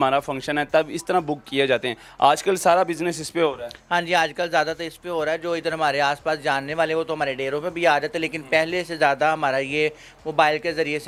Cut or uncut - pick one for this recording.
uncut